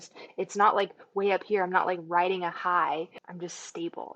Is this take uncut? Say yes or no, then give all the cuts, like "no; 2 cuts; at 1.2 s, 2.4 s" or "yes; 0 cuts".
no; 1 cut; at 3.2 s